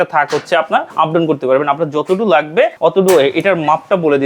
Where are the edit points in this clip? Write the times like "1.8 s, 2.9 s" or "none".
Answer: 0.9 s, 2.7 s